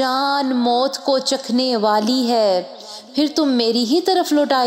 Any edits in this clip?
no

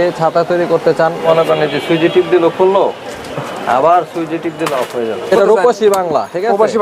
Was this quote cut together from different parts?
yes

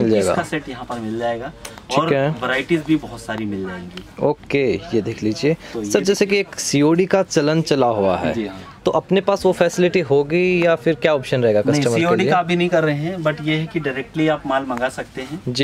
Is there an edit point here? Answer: no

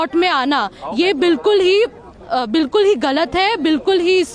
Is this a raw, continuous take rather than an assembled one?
yes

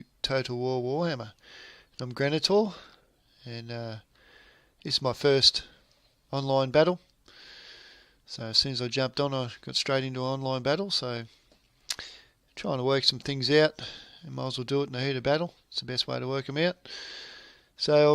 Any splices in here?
yes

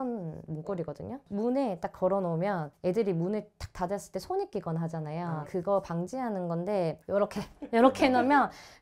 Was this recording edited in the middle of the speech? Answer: no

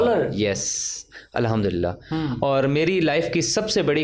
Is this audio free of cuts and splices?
yes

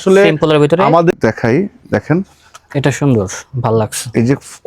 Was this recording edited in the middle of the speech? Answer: yes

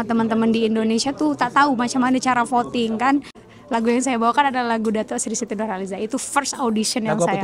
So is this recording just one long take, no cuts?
no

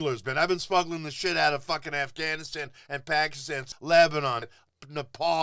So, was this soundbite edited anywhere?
yes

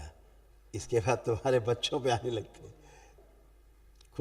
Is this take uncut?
no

